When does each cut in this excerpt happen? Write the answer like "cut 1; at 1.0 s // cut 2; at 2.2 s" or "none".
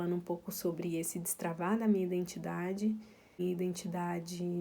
cut 1; at 3.4 s